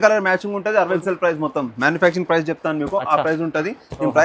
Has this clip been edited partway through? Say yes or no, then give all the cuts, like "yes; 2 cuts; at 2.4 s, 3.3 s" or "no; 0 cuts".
yes; 1 cut; at 1.0 s